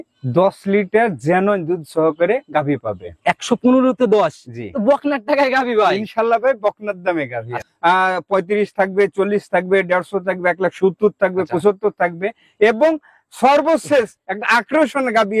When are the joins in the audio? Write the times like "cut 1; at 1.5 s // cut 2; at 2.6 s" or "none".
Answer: cut 1; at 7.6 s